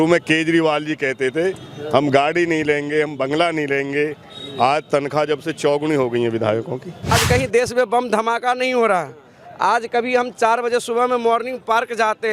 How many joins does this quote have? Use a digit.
1